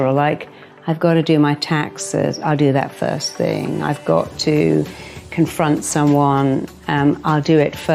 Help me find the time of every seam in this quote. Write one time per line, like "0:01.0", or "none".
none